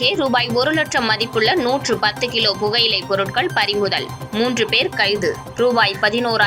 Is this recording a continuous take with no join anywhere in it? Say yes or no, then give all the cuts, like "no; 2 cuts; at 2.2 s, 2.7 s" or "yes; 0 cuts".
yes; 0 cuts